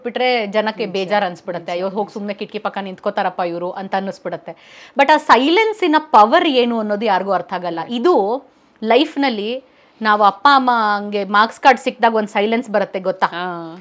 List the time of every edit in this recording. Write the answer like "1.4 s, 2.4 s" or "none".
none